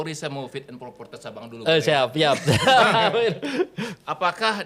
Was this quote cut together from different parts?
no; 0 cuts

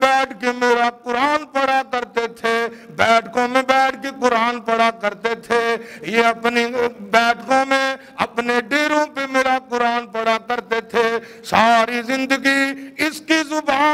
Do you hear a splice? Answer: no; 0 cuts

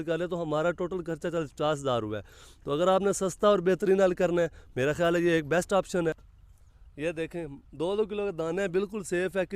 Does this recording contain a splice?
yes; 1 cut; at 6.3 s

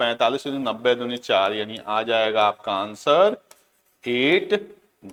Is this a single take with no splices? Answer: yes; 0 cuts

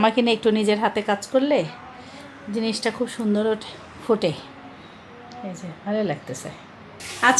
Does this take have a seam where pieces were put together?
no; 0 cuts

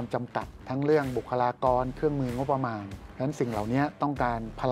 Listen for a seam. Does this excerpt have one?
no; 0 cuts

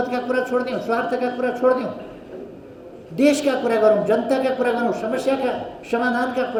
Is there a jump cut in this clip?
no; 0 cuts

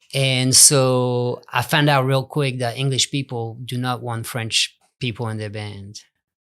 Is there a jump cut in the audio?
yes; 1 cut; at 4.9 s

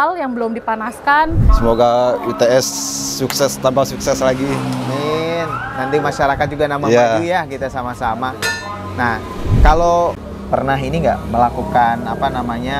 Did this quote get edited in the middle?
yes; 2 cuts; at 1.5 s, 10.2 s

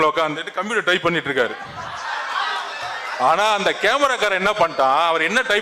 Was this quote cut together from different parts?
no; 0 cuts

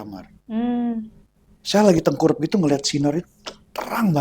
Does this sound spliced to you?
no; 0 cuts

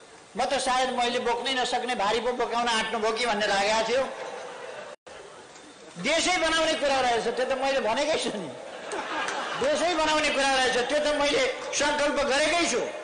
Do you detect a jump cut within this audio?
no; 0 cuts

